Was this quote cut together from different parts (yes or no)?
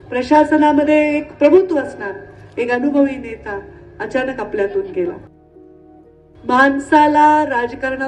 yes